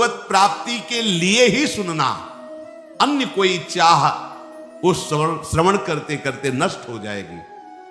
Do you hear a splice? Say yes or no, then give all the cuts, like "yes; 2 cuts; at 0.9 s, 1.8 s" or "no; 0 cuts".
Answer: no; 0 cuts